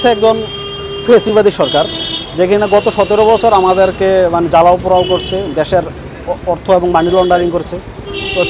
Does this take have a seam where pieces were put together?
no; 0 cuts

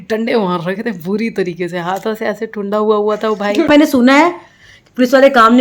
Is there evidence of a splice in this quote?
yes; 1 cut; at 3.7 s

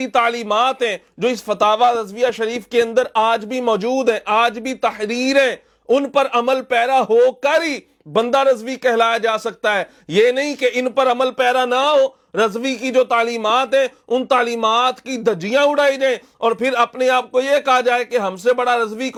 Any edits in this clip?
no; 0 cuts

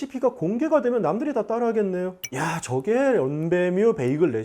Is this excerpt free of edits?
no; 1 cut; at 2.2 s

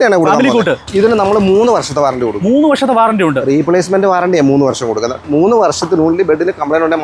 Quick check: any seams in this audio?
yes; 2 cuts; at 0.9 s, 5.2 s

